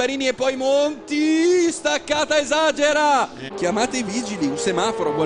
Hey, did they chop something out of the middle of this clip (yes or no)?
yes